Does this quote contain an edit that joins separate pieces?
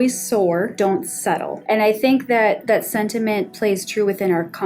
yes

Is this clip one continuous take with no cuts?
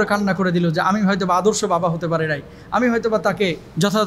yes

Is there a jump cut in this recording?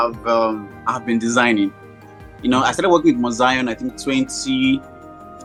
no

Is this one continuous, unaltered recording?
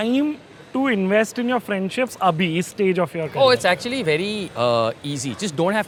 yes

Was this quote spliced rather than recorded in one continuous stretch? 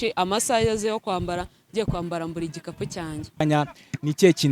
yes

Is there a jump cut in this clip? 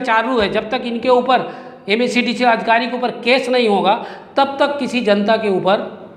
no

